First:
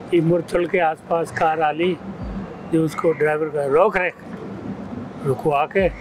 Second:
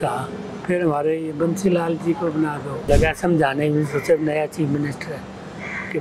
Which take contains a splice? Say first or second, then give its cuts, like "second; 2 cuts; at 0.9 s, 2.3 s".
second; 1 cut; at 2.9 s